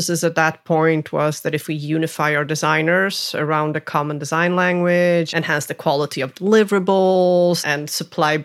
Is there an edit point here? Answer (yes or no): yes